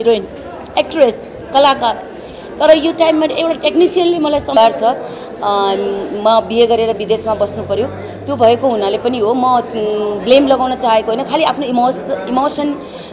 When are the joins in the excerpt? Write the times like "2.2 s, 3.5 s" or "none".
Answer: 4.5 s